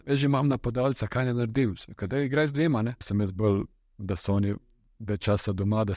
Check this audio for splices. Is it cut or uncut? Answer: cut